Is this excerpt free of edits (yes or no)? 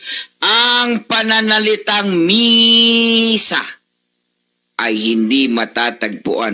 yes